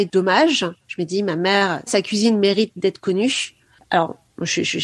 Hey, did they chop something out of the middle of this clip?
no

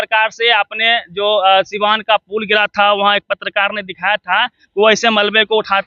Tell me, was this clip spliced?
no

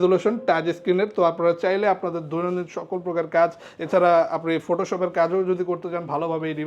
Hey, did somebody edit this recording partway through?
no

